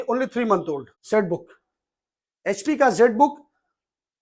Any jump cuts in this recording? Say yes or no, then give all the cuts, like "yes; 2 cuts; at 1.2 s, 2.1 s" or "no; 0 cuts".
yes; 1 cut; at 0.9 s